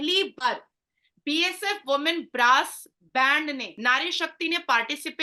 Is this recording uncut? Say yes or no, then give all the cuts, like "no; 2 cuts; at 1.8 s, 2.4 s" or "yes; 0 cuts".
yes; 0 cuts